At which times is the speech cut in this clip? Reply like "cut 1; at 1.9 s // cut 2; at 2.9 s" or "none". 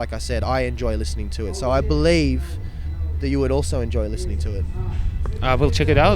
none